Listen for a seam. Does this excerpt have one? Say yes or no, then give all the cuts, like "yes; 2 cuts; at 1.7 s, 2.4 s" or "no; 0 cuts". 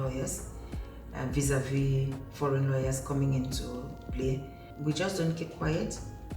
yes; 1 cut; at 4.6 s